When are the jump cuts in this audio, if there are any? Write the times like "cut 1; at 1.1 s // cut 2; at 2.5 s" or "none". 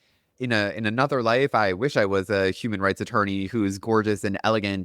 none

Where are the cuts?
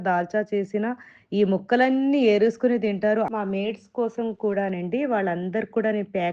cut 1; at 3.3 s

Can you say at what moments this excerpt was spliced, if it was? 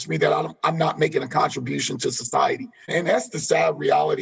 cut 1; at 2.9 s

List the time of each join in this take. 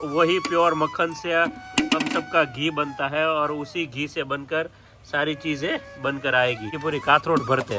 cut 1; at 6.7 s

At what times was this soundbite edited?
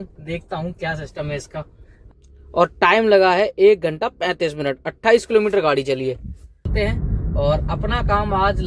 cut 1; at 2.0 s // cut 2; at 6.7 s

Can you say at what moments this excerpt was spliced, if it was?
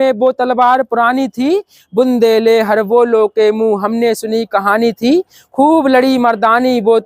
none

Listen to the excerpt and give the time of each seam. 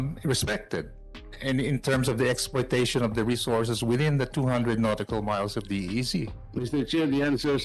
cut 1; at 6.4 s

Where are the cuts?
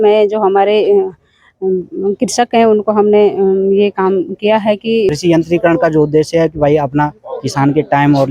cut 1; at 5.1 s

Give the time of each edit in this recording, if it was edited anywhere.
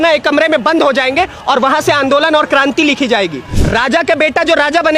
cut 1; at 3.6 s

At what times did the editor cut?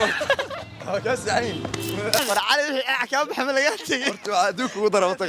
cut 1; at 2.2 s

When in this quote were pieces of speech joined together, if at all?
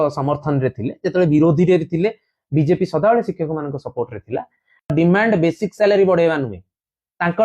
cut 1; at 4.9 s

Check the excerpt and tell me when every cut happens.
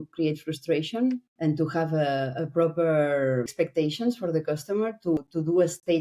cut 1; at 1.3 s // cut 2; at 3.5 s // cut 3; at 5.2 s

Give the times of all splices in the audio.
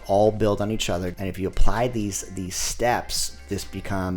cut 1; at 1.1 s

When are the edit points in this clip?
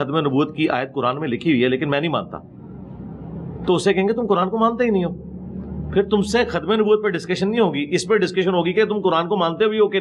none

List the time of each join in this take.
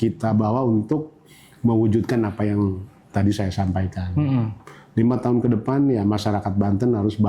none

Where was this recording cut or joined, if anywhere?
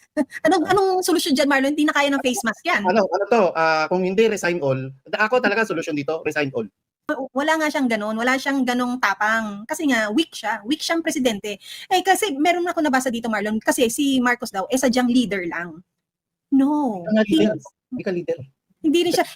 cut 1; at 7.1 s

